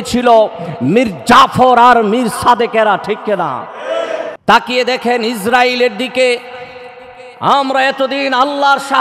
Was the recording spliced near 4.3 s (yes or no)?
yes